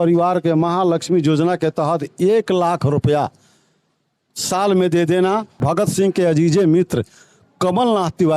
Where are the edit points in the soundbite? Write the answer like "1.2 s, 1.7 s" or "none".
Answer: 5.6 s